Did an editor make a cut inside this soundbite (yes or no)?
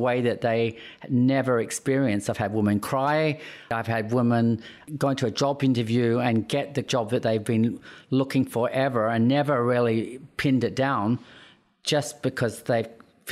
yes